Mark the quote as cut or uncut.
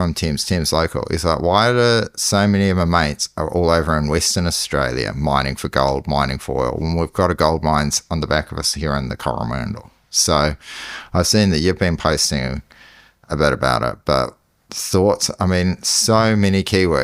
uncut